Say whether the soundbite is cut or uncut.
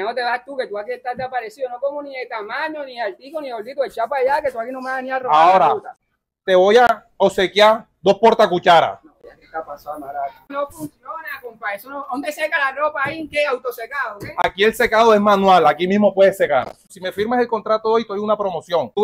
cut